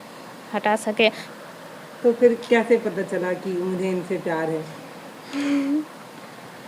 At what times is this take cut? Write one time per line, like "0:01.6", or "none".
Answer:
0:01.2